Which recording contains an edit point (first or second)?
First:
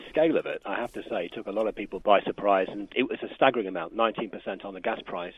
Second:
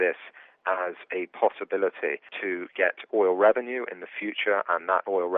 first